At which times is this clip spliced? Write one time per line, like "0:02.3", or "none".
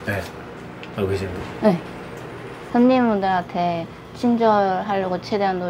0:02.6